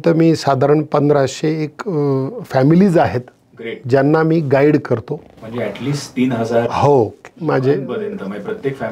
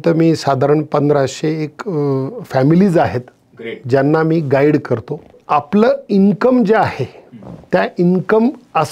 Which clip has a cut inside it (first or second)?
second